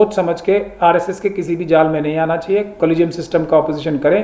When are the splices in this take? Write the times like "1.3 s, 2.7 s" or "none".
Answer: none